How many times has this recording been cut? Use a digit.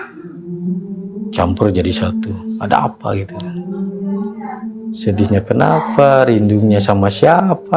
0